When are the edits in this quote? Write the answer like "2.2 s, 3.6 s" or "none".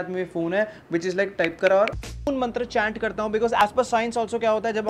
2.3 s